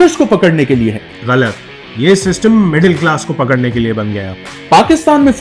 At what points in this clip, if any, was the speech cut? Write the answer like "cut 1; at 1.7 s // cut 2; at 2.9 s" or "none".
cut 1; at 4.3 s